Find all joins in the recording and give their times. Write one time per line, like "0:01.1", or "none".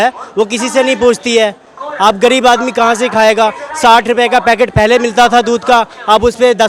none